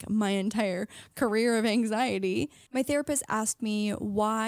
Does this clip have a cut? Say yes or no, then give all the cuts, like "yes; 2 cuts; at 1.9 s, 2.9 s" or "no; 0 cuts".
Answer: yes; 1 cut; at 2.6 s